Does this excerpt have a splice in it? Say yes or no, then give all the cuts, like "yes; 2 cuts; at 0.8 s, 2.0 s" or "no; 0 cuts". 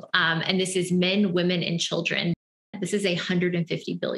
yes; 1 cut; at 2.4 s